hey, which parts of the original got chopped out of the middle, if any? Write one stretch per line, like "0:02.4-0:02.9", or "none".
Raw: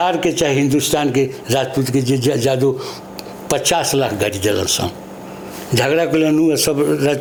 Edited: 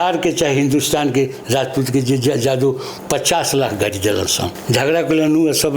0:02.9-0:03.3
0:05.0-0:05.6